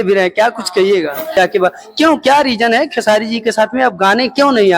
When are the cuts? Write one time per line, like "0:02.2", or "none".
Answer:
0:01.4